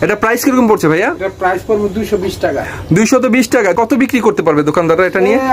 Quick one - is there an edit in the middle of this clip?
yes; 1 cut; at 3.7 s

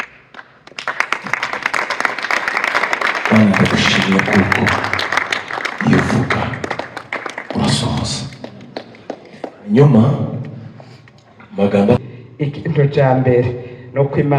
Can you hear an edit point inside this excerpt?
yes; 1 cut; at 12.0 s

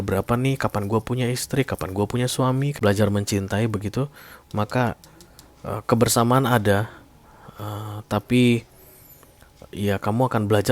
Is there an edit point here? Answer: yes; 1 cut; at 2.7 s

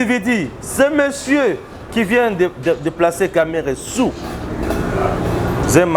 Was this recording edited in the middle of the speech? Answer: no; 0 cuts

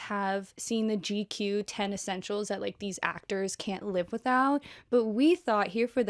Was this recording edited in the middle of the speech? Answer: no; 0 cuts

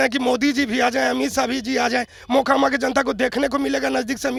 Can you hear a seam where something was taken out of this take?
no; 0 cuts

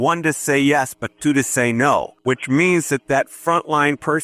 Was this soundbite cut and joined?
yes; 1 cut; at 2.1 s

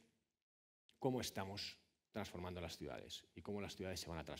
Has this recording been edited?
yes; 1 cut; at 1.3 s

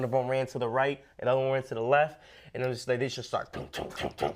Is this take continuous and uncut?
yes; 0 cuts

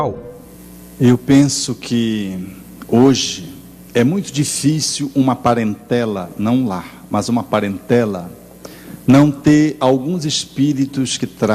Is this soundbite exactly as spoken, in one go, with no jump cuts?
no; 1 cut; at 6.3 s

